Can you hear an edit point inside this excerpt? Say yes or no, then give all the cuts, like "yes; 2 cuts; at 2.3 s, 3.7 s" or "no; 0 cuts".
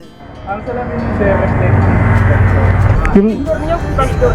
yes; 1 cut; at 3.0 s